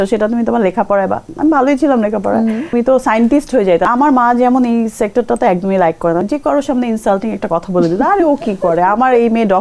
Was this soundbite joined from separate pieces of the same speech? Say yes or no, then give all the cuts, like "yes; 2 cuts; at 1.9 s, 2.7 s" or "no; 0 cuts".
yes; 3 cuts; at 2.7 s, 3.9 s, 6.2 s